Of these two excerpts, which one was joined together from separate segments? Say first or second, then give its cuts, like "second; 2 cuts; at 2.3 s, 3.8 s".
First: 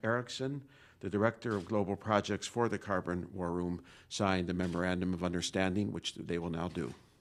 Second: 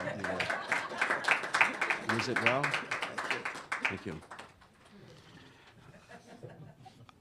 second; 1 cut; at 2.1 s